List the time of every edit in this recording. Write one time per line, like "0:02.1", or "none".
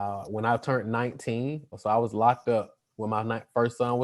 0:01.8